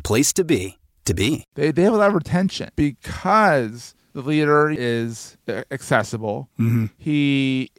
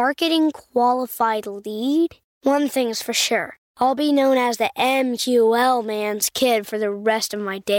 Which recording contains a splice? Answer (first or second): first